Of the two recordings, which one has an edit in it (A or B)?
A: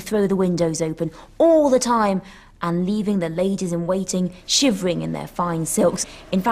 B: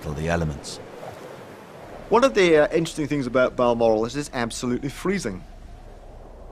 A